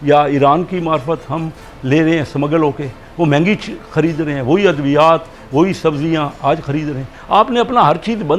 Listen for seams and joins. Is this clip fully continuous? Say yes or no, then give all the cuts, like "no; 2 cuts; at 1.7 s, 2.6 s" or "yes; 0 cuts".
yes; 0 cuts